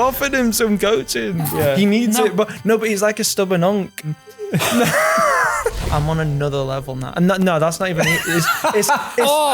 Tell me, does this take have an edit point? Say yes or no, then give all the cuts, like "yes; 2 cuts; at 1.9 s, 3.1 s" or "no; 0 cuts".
yes; 2 cuts; at 4.1 s, 5.8 s